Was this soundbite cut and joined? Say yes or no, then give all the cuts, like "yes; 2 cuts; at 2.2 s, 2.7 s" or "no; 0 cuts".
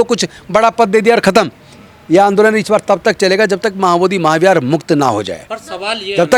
no; 0 cuts